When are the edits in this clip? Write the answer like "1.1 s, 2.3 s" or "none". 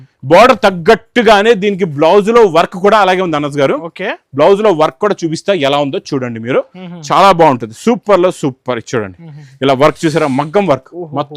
none